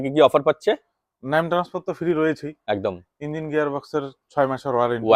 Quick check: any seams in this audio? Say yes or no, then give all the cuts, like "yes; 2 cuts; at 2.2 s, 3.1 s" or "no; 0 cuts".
no; 0 cuts